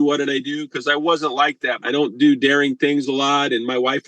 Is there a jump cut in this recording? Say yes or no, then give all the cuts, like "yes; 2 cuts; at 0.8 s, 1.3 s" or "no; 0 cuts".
yes; 1 cut; at 1.7 s